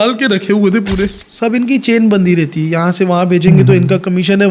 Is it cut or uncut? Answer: cut